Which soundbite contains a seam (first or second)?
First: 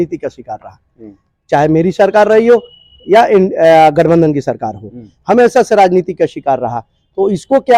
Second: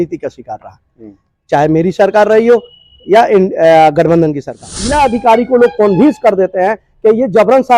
second